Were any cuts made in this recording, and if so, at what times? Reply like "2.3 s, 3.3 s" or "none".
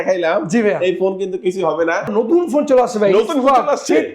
2.1 s